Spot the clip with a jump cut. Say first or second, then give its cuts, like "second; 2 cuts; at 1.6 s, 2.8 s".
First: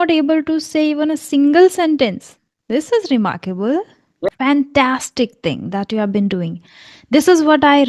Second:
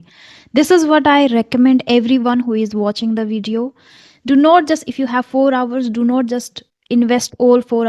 first; 1 cut; at 4.3 s